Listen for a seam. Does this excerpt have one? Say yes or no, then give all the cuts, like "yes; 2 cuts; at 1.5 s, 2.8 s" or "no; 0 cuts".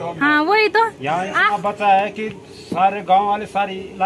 no; 0 cuts